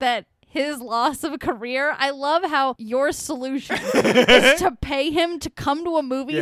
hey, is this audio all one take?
no; 1 cut; at 2.8 s

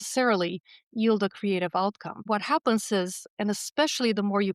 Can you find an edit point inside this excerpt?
yes; 1 cut; at 2.1 s

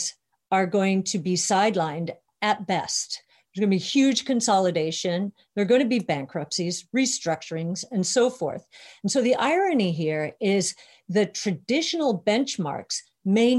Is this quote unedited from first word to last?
yes; 0 cuts

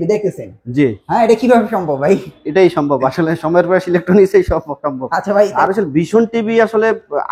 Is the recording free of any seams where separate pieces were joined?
no; 1 cut; at 5.5 s

